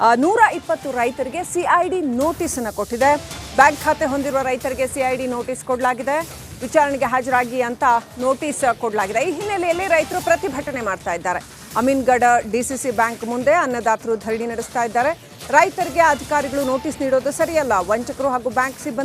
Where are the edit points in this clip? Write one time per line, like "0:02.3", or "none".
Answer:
0:14.6